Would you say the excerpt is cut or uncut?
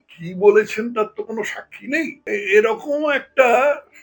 cut